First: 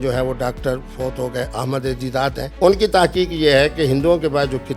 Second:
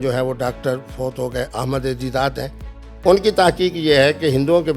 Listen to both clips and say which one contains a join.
first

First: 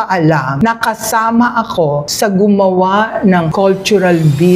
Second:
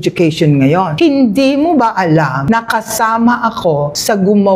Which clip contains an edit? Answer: second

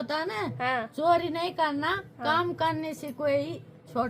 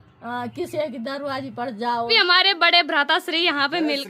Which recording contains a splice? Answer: second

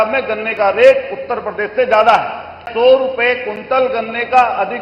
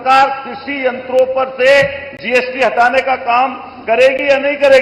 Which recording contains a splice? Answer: first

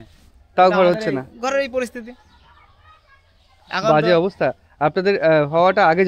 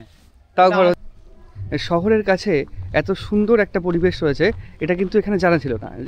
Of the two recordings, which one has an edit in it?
second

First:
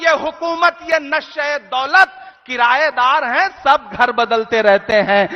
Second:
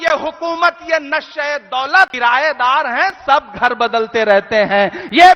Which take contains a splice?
second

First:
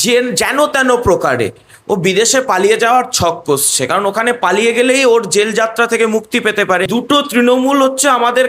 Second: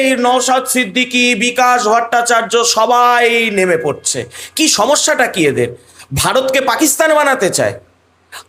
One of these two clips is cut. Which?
first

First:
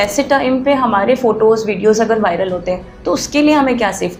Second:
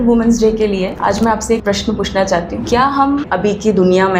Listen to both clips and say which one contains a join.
second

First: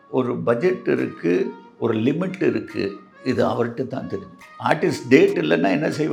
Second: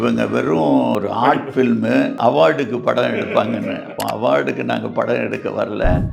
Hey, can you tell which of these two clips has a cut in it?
second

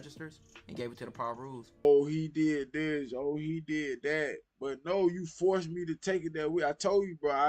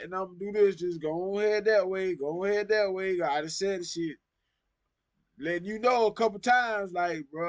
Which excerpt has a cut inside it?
first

